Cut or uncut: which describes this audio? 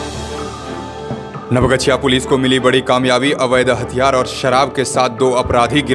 cut